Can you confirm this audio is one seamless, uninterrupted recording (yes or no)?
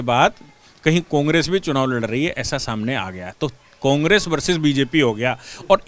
yes